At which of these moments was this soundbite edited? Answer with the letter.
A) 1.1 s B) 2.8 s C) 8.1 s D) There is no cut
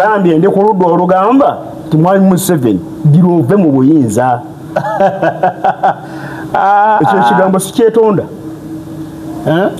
D